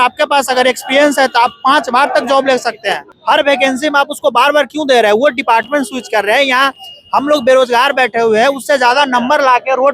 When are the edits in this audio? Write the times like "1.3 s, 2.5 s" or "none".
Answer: 3.1 s